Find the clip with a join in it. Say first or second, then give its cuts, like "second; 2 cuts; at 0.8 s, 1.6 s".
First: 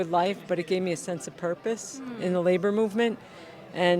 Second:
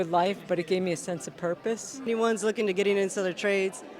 second; 1 cut; at 2.0 s